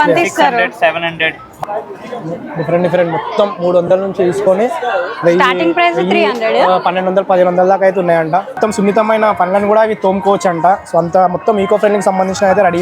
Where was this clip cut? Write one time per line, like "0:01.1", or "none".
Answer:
0:01.5
0:08.6